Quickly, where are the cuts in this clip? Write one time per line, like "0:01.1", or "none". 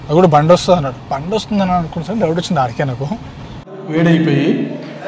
0:03.8